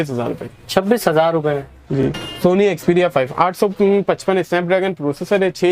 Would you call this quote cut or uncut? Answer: cut